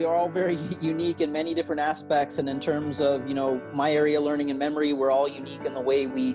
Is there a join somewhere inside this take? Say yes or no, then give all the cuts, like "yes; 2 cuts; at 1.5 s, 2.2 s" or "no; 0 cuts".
no; 0 cuts